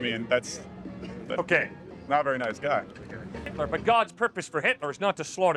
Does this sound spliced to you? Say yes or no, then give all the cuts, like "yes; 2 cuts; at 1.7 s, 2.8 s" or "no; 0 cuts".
yes; 1 cut; at 3.5 s